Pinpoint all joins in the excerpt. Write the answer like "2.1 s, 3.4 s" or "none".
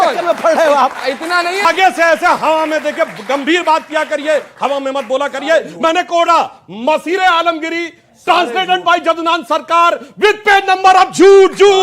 1.6 s

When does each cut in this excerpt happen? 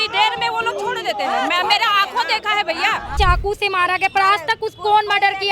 3.1 s

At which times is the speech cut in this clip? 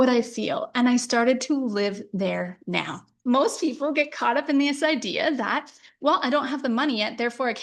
3.1 s

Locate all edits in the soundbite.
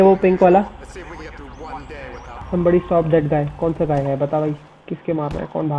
2.4 s

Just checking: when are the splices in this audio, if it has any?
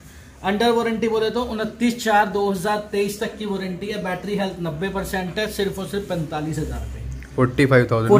none

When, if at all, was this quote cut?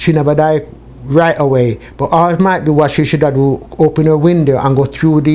none

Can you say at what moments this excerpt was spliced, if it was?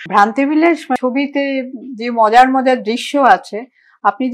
1.0 s

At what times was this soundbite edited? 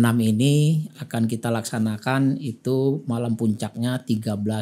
none

